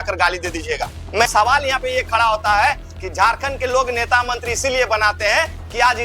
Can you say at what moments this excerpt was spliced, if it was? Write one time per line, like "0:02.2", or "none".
0:01.3